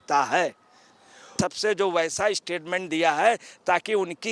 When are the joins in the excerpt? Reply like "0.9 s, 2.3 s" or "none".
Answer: 1.4 s